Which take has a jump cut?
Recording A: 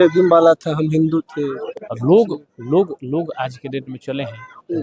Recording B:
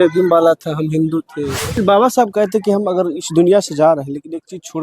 B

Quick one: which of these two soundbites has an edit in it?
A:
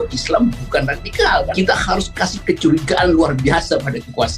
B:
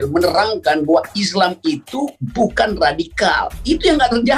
A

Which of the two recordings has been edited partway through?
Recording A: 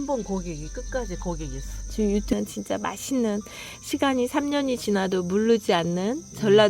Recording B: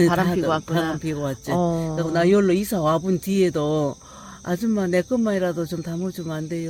A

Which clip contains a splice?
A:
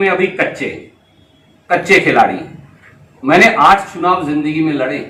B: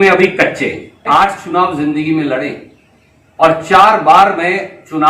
B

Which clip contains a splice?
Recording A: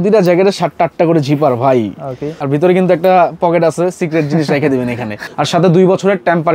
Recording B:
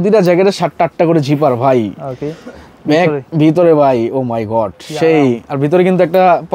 A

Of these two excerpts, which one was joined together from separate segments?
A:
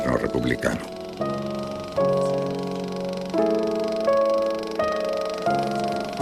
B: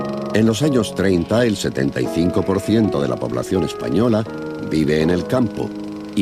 A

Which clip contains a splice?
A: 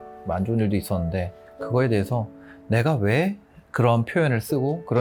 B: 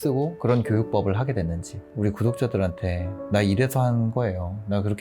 B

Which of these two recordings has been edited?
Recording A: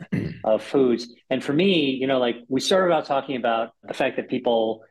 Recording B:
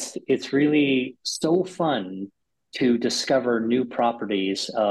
A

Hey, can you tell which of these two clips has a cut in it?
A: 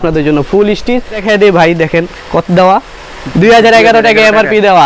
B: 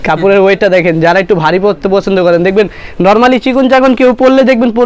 A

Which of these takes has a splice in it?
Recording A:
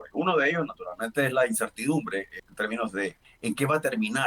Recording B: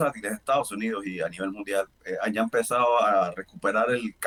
A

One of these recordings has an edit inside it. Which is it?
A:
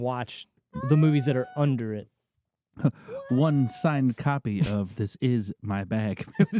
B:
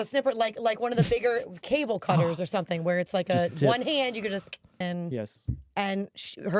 B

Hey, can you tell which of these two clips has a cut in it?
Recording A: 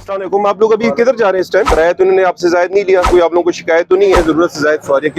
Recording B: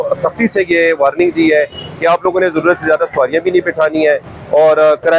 A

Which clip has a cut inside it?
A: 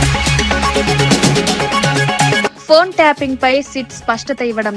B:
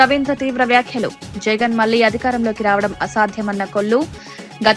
A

